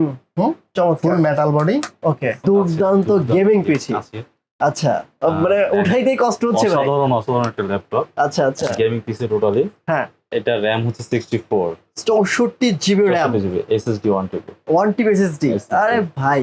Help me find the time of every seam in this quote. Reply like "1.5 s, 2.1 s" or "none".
2.4 s, 10.2 s